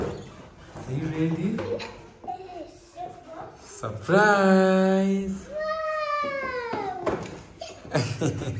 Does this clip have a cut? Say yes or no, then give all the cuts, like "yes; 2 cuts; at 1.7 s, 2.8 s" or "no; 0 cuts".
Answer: no; 0 cuts